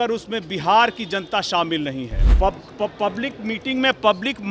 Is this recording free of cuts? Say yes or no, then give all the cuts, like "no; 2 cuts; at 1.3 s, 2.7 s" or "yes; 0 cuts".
no; 1 cut; at 2.2 s